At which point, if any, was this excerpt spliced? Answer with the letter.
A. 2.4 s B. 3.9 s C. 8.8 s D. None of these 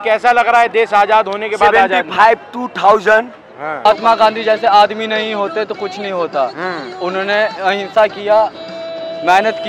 B